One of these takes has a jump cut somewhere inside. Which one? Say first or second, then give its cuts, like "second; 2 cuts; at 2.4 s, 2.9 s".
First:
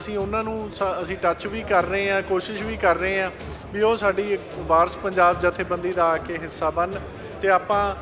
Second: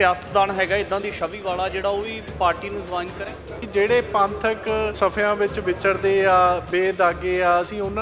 second; 2 cuts; at 3.6 s, 5.0 s